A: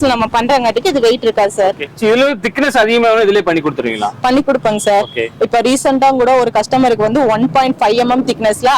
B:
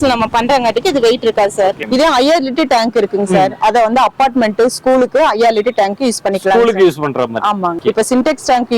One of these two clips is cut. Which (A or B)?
B